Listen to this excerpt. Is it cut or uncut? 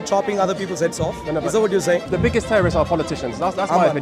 cut